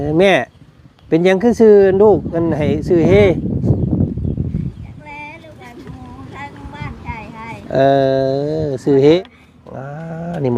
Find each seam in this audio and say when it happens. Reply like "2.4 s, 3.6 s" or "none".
9.2 s